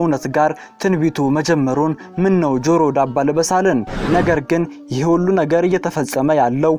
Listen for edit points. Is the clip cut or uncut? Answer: cut